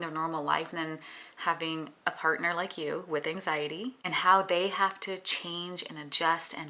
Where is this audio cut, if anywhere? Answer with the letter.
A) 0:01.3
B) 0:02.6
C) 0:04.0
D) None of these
C